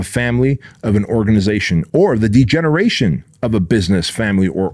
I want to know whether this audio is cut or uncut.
uncut